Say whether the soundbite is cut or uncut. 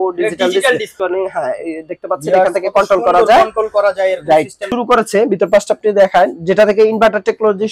cut